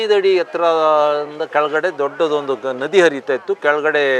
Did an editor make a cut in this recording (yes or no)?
no